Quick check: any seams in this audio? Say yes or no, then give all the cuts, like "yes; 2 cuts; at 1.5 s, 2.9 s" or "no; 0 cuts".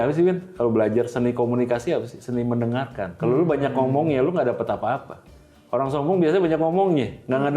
yes; 1 cut; at 3.0 s